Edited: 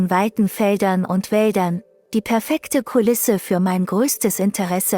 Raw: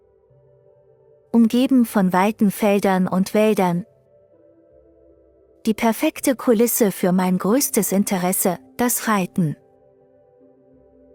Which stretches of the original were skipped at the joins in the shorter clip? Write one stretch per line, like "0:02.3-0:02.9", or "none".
0:03.9-0:05.4